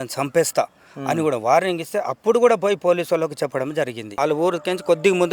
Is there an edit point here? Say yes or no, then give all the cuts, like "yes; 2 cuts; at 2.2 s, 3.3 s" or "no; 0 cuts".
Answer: yes; 1 cut; at 4.0 s